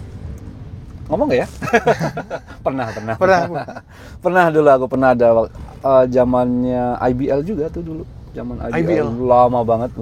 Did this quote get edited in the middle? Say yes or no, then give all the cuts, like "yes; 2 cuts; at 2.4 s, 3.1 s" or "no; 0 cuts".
no; 0 cuts